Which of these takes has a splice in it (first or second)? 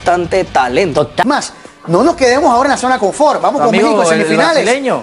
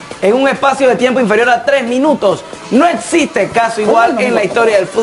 first